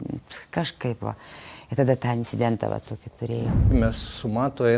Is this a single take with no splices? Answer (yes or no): no